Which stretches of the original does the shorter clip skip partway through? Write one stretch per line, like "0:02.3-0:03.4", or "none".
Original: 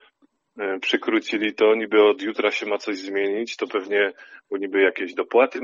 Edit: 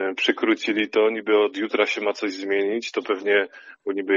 none